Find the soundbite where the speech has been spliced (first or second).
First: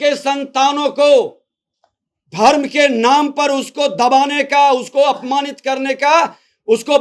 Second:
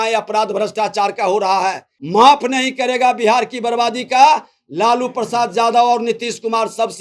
second